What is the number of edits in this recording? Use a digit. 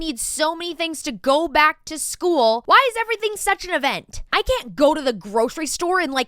2